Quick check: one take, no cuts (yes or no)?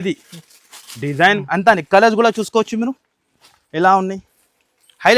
no